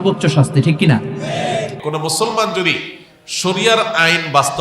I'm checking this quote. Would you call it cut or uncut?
cut